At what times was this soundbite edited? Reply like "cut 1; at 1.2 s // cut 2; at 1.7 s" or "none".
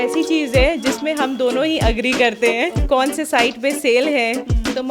cut 1; at 2.8 s